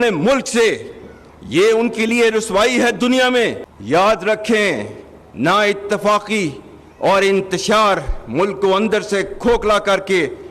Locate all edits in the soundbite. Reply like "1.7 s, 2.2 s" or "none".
3.6 s